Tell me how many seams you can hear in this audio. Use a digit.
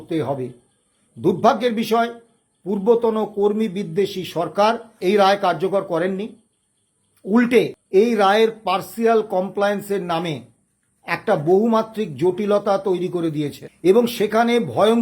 3